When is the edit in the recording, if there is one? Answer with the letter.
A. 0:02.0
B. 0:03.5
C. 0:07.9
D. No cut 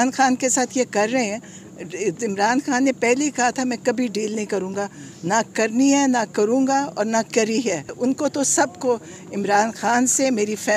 C